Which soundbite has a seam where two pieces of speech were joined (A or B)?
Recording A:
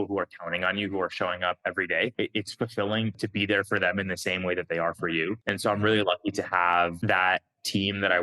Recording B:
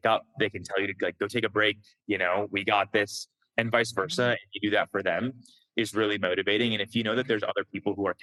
A